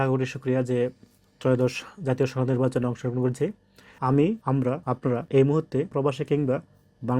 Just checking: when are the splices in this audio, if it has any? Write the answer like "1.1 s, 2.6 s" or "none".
3.9 s